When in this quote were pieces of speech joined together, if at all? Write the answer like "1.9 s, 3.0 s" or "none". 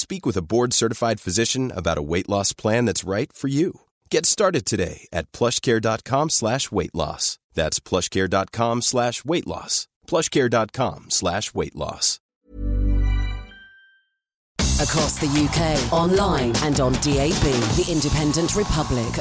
14.5 s